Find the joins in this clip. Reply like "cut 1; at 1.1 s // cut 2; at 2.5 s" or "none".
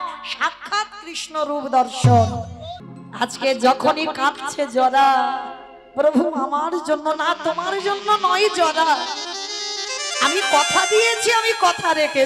cut 1; at 2.8 s